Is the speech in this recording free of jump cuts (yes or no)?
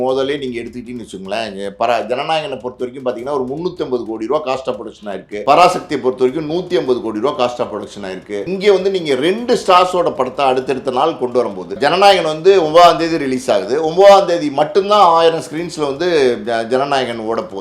no